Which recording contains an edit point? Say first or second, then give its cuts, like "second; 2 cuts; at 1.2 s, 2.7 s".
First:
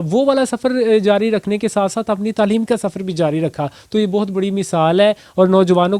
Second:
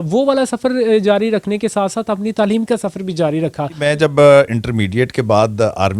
second; 1 cut; at 3.8 s